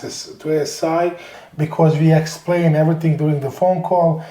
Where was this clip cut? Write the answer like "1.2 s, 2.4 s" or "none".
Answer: 1.3 s

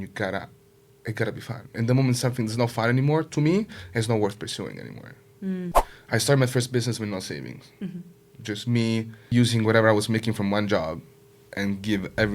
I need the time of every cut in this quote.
5.9 s, 9.2 s

